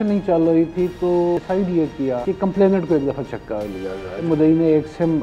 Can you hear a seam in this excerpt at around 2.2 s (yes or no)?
yes